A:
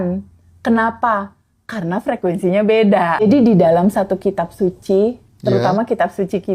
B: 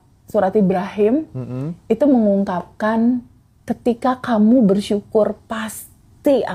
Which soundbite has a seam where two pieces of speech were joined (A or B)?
A